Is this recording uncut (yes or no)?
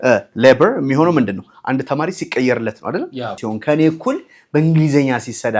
no